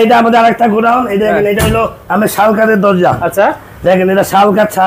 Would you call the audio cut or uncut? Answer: uncut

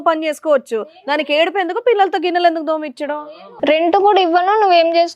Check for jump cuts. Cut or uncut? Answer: cut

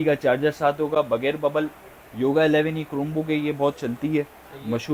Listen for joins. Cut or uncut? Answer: uncut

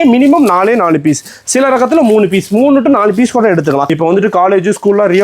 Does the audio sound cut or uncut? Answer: cut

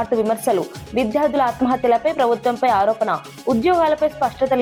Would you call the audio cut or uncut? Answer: uncut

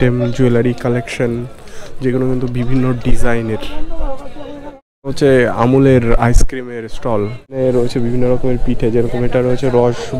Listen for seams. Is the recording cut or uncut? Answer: cut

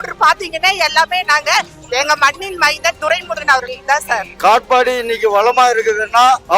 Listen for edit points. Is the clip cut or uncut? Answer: uncut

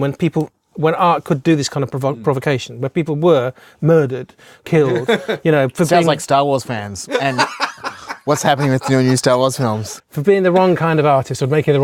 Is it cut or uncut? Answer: uncut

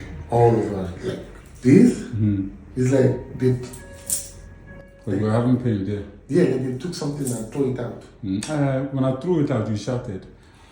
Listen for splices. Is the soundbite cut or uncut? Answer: cut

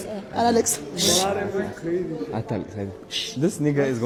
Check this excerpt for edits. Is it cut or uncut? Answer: uncut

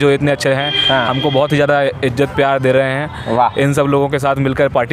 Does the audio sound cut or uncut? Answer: uncut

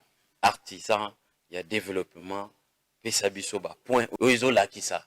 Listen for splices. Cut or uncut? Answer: cut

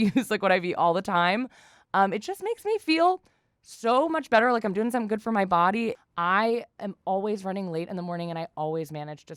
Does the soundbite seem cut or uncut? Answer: uncut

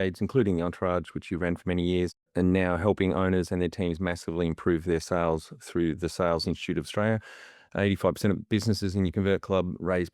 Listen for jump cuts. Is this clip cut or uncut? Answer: cut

